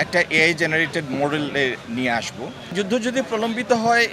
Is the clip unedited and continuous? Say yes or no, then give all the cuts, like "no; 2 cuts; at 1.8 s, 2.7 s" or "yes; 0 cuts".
no; 1 cut; at 2.7 s